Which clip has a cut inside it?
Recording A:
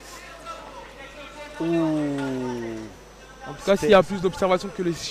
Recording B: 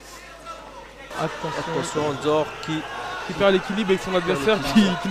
B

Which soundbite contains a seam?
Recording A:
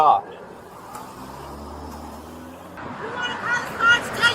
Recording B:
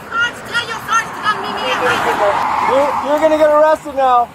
A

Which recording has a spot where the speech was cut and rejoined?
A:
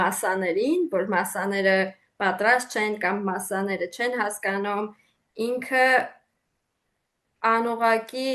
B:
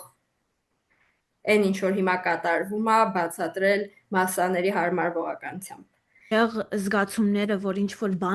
B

